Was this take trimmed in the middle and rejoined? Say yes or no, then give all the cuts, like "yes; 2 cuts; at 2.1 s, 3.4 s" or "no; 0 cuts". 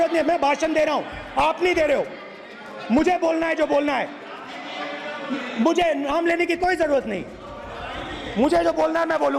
no; 0 cuts